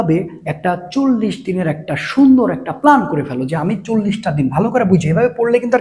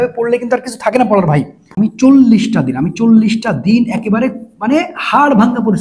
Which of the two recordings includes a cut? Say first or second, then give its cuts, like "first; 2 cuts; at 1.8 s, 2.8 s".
second; 1 cut; at 1.6 s